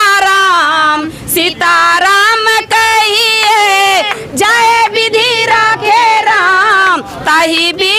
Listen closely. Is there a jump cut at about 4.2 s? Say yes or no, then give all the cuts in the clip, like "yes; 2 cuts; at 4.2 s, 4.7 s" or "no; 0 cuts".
no; 0 cuts